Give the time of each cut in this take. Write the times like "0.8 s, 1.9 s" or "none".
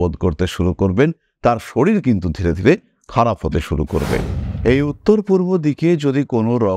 4.4 s